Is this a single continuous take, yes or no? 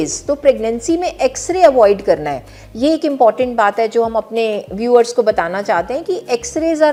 yes